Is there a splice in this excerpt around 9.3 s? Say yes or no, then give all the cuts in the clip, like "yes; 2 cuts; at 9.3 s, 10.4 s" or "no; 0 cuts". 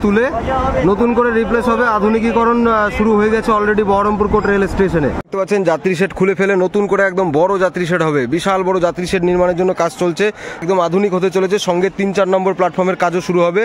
no; 2 cuts; at 5.2 s, 10.6 s